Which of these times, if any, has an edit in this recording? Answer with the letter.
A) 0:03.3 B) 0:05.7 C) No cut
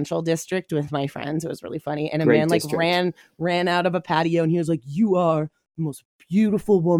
C